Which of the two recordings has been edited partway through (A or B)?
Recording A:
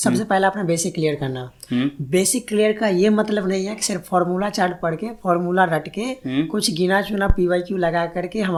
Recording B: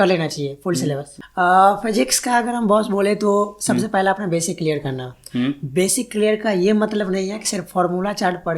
B